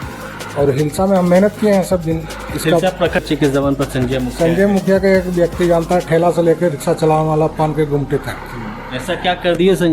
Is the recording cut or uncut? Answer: cut